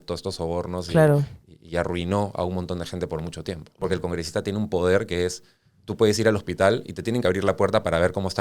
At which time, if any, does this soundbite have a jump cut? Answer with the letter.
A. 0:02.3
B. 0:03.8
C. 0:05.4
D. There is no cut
B